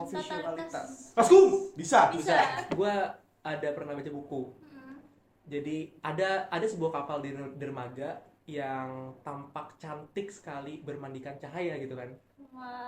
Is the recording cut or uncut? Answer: cut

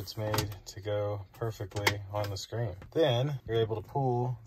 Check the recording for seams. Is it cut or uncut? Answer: cut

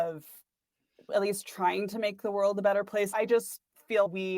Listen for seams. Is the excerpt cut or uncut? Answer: cut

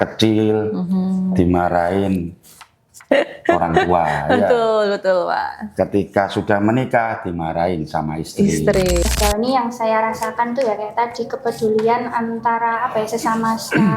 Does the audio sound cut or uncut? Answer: cut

